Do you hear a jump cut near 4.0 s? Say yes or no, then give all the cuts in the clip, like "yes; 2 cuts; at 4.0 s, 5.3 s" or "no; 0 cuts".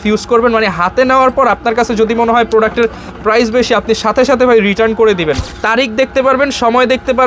no; 1 cut; at 5.4 s